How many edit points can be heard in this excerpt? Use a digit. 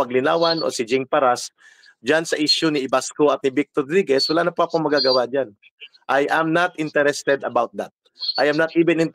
0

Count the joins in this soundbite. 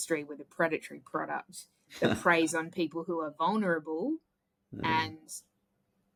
0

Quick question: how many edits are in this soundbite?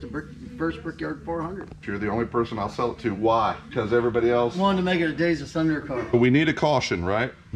3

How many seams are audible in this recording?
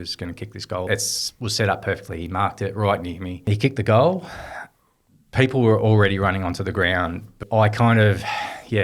3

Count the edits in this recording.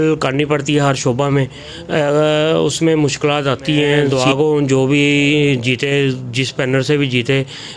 1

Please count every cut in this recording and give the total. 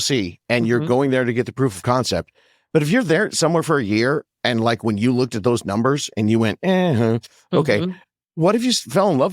0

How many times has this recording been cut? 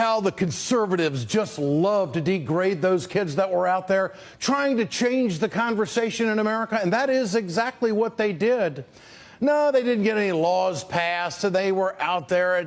1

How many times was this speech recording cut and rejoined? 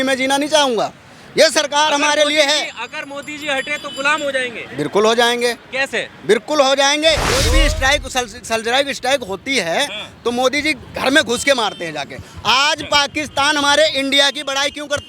1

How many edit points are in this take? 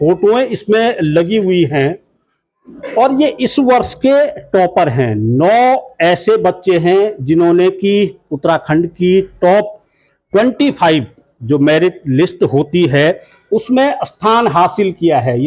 0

